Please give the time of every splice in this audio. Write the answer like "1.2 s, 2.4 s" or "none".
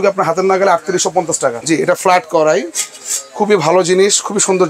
1.6 s